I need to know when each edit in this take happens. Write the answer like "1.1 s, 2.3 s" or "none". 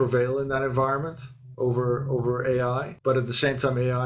2.9 s

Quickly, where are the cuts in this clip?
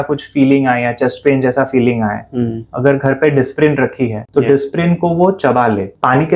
none

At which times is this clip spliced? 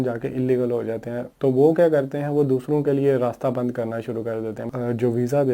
1.2 s, 4.7 s

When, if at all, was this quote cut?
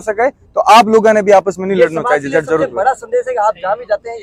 none

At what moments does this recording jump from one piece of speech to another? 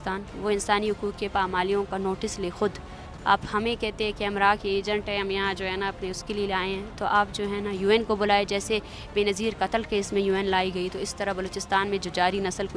none

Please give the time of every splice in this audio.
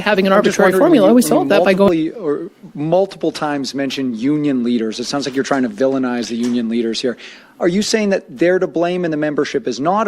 1.9 s

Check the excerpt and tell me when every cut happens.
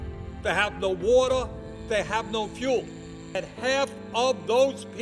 3.4 s

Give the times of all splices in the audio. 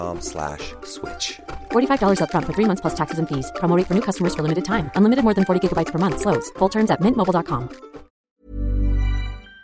8.1 s

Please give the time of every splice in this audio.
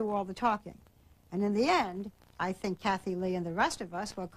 none

